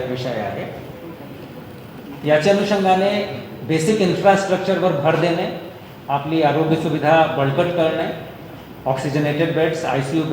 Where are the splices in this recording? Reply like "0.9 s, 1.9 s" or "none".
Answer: 6.3 s